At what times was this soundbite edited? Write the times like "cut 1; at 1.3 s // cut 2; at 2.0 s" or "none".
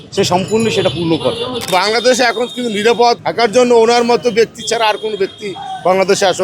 cut 1; at 1.5 s // cut 2; at 3.2 s